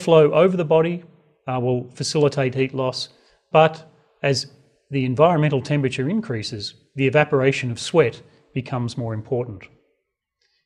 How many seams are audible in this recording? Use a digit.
0